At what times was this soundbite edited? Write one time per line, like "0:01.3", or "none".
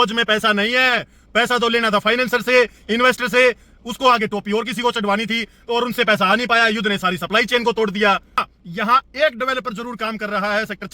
0:08.6